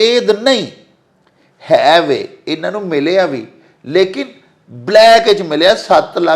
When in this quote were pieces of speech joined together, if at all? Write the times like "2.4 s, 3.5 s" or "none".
none